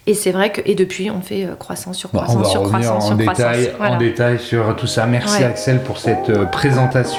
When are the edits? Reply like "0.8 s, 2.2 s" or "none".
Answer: none